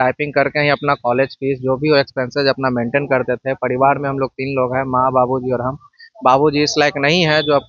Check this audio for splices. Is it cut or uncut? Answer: uncut